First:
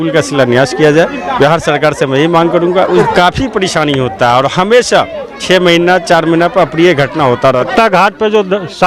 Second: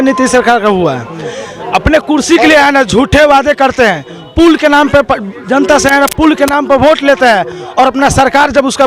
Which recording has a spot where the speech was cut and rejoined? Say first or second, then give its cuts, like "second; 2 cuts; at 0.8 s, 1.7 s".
first; 2 cuts; at 3.0 s, 7.7 s